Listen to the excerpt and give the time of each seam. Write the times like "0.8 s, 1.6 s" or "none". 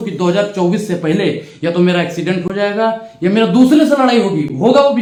none